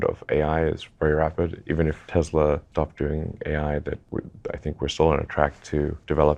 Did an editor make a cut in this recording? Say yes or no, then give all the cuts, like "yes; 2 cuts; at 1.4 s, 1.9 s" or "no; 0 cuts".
no; 0 cuts